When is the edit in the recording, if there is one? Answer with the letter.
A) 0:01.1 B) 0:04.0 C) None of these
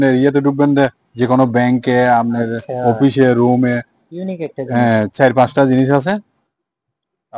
C